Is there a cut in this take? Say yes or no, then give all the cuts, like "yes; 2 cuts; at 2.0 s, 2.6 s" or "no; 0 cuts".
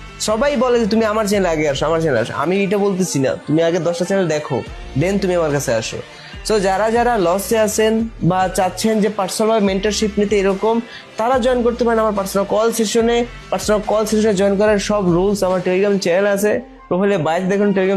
no; 0 cuts